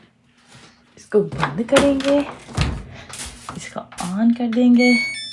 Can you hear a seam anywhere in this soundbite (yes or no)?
no